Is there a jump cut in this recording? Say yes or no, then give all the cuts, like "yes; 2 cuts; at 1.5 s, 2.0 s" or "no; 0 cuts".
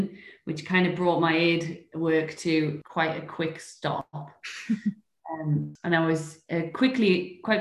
yes; 2 cuts; at 2.8 s, 5.7 s